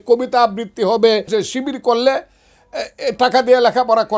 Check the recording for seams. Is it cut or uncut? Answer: cut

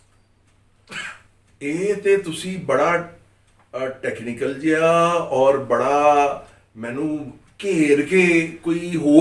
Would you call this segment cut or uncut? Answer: uncut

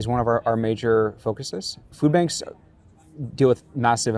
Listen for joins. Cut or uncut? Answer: cut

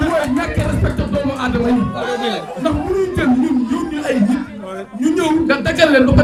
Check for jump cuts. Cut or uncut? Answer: uncut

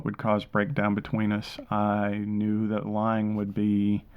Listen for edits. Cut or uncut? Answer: uncut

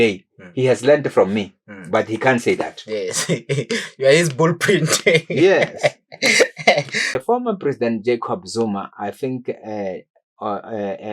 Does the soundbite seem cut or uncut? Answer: cut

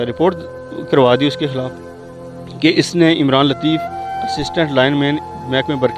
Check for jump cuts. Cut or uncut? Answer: uncut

